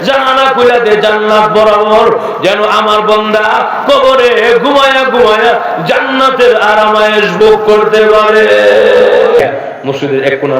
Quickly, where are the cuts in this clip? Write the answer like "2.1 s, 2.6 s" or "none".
9.4 s